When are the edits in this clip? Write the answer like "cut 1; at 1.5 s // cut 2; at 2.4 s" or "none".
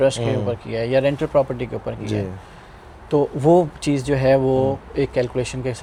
none

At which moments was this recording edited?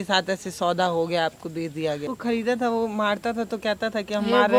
cut 1; at 2.0 s

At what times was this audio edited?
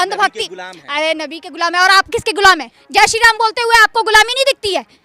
cut 1; at 2.7 s

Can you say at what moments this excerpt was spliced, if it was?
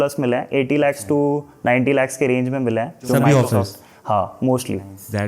none

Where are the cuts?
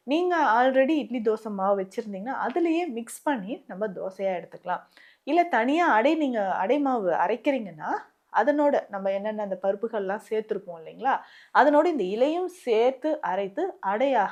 none

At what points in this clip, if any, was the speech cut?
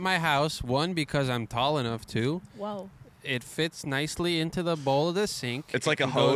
none

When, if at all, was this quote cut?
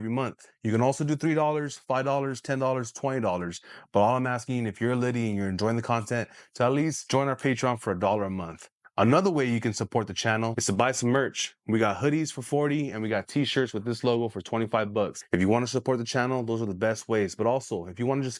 none

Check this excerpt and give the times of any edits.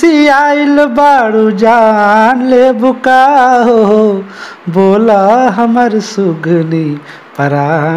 none

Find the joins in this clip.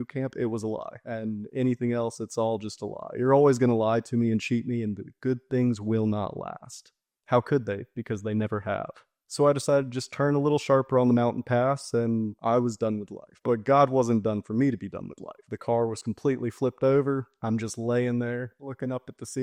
none

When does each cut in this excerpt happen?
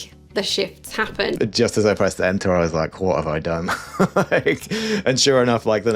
cut 1; at 1.4 s

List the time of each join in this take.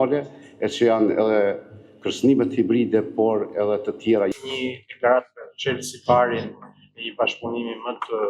cut 1; at 4.3 s

